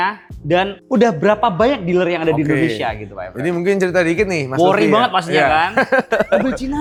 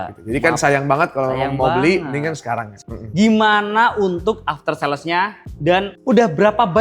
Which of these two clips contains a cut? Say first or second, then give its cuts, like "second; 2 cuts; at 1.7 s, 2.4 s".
second; 1 cut; at 2.8 s